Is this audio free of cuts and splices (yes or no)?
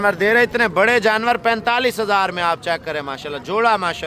yes